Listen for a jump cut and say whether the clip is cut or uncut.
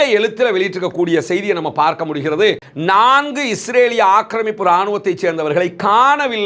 cut